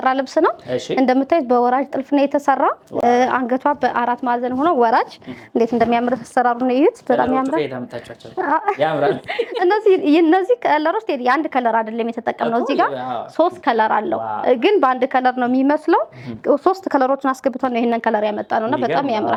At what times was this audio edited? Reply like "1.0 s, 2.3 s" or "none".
none